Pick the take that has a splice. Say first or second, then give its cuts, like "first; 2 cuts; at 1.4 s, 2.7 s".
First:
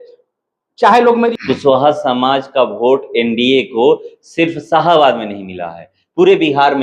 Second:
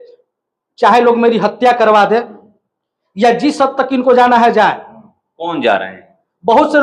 first; 1 cut; at 1.3 s